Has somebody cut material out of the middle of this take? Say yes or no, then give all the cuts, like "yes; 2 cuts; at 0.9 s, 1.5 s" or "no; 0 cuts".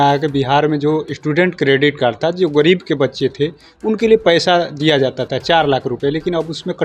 no; 0 cuts